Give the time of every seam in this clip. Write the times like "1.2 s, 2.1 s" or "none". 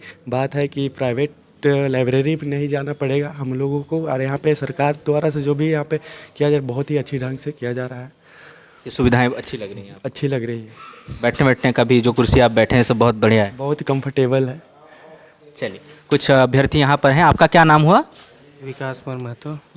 none